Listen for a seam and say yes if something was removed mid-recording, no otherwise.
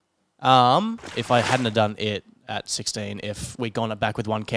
yes